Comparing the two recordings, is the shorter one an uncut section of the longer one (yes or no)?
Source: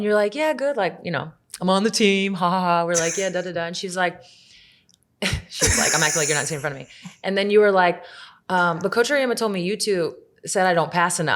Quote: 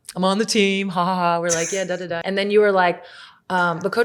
no